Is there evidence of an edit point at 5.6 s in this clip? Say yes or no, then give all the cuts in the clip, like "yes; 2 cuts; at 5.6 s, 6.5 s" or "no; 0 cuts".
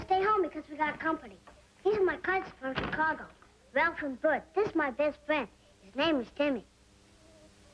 no; 0 cuts